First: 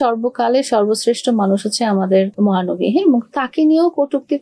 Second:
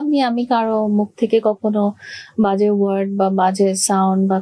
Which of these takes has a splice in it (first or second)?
first